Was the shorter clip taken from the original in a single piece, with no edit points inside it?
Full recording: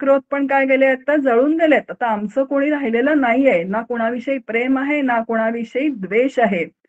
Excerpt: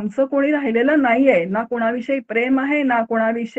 yes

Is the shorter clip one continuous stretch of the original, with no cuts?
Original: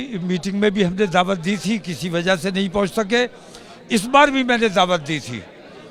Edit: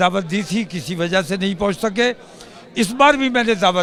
yes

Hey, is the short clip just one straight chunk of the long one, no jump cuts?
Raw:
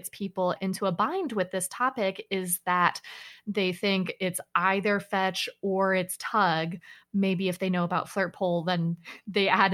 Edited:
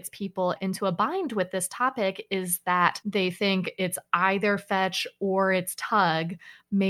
no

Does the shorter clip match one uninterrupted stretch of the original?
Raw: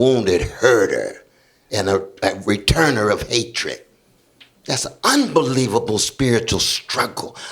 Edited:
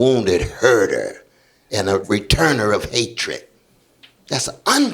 no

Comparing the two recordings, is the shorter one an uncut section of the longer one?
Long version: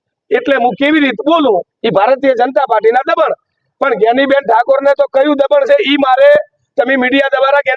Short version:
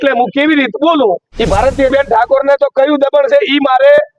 no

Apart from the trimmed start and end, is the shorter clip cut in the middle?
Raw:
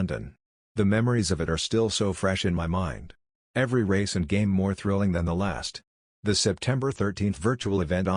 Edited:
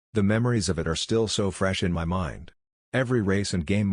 no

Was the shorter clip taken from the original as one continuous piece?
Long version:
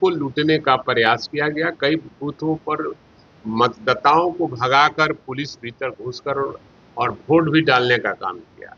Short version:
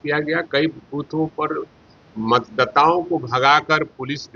yes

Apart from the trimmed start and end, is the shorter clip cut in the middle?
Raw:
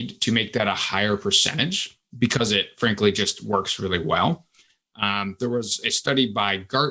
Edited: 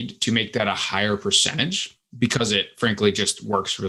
no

